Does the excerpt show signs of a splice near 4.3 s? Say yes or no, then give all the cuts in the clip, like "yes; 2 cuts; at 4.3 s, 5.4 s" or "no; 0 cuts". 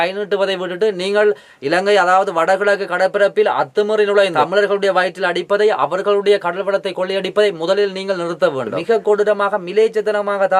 yes; 2 cuts; at 4.3 s, 8.8 s